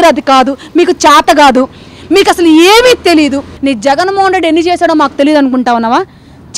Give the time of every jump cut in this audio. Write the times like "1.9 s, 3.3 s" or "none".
3.5 s